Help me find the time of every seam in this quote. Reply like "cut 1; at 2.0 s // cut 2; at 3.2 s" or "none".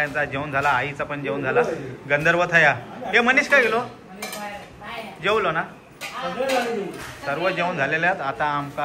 none